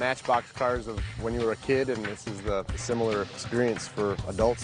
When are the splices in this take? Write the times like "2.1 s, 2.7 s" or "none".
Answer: 2.8 s